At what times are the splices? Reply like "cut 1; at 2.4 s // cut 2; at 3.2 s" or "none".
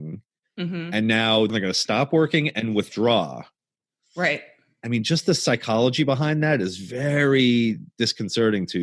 cut 1; at 1.5 s